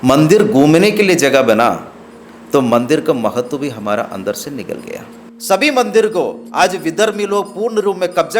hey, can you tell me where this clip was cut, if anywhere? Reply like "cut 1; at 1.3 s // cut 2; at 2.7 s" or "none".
cut 1; at 5.3 s